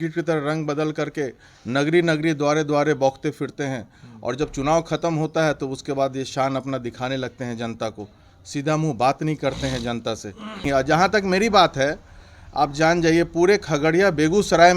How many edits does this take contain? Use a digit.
1